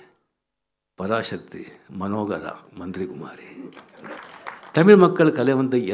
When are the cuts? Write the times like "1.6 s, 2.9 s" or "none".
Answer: 4.2 s